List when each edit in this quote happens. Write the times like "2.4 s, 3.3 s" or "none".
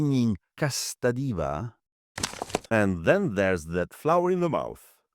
2.3 s